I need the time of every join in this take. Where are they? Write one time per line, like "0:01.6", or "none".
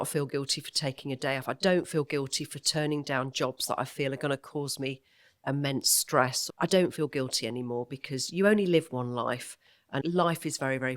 0:06.4
0:10.0

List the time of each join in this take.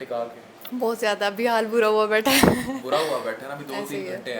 none

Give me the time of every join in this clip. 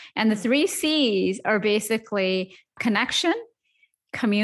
0:02.7

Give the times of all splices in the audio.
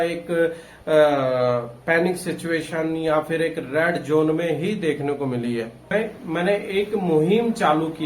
0:05.9

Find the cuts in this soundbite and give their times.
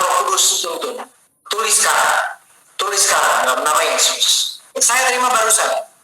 0:04.8

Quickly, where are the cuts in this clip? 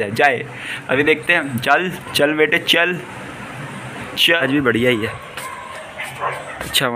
0:04.4

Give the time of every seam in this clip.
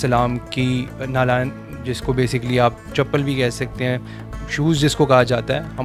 0:02.8

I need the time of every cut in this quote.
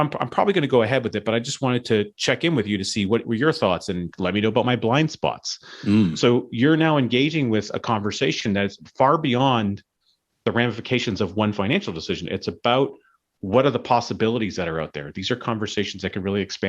0:04.0

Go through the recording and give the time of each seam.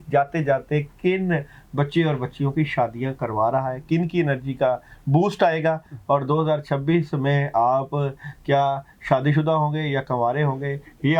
none

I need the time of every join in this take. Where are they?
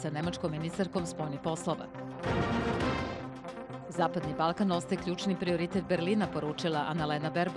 none

